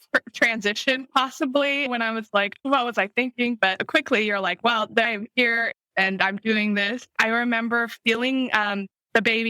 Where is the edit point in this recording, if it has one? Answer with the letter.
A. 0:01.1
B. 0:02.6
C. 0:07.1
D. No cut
C